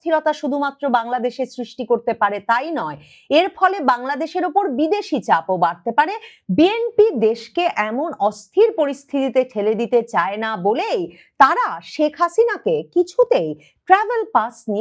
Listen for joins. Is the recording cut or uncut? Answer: uncut